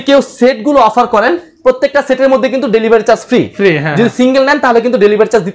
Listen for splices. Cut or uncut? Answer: uncut